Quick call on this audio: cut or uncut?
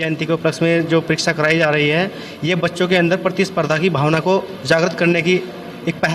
uncut